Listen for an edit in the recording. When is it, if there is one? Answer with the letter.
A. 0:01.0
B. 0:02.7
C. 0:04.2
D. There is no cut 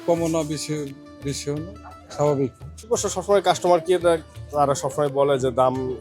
B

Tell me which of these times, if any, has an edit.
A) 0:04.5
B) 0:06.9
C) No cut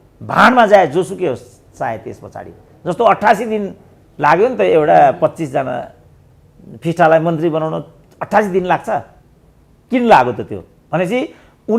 C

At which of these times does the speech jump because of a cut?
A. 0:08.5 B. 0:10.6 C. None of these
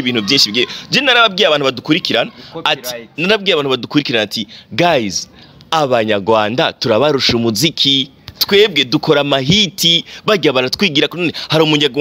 C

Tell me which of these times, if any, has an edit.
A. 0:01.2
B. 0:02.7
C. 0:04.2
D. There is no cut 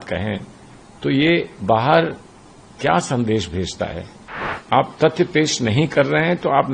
C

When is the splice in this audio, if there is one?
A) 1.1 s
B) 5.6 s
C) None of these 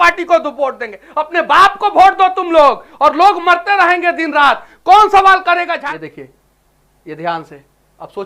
B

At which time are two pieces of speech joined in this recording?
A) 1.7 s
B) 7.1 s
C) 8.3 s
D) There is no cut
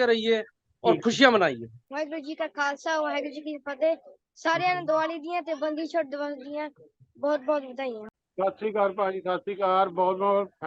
D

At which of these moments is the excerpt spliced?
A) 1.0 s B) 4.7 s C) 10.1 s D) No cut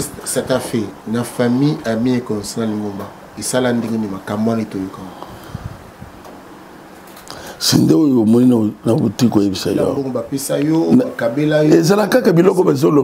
C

